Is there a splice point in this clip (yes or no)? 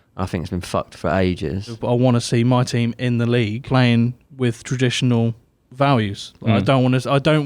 yes